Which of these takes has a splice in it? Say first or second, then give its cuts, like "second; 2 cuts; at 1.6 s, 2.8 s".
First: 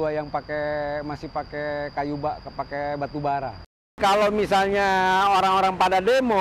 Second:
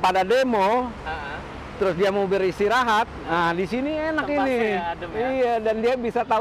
first; 1 cut; at 4.0 s